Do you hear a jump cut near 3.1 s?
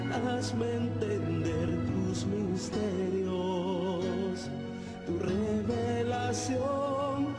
no; 0 cuts

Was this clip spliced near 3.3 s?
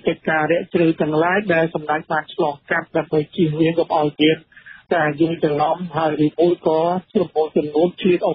no; 0 cuts

